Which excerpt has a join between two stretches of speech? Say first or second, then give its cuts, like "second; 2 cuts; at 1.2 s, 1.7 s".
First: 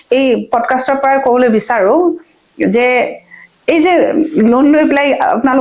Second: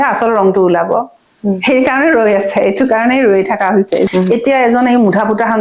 second; 1 cut; at 4.1 s